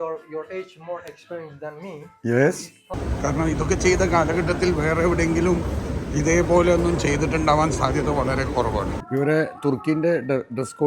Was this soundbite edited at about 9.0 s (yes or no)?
yes